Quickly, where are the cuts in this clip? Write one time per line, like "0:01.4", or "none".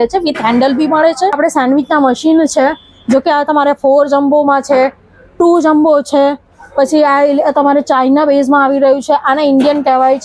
0:01.4